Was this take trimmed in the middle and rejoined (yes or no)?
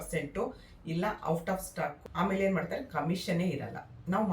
yes